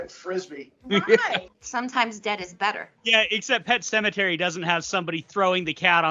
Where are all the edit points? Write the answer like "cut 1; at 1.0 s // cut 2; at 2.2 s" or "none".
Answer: cut 1; at 1.5 s // cut 2; at 2.9 s